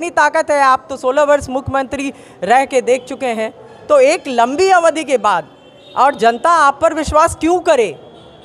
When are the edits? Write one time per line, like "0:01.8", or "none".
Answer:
none